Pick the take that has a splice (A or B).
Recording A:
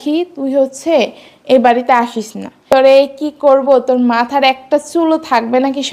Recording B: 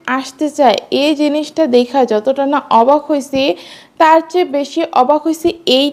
A